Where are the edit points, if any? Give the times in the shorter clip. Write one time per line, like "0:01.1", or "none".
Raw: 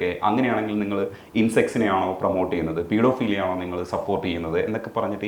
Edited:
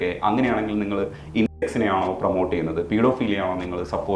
none